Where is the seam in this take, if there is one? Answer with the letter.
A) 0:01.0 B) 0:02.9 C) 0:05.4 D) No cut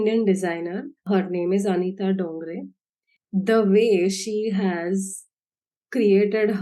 A